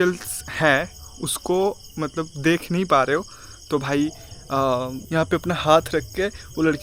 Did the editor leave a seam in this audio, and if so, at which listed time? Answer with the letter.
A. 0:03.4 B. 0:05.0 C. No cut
B